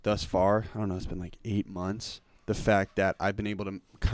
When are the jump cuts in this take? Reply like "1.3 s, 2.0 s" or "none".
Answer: none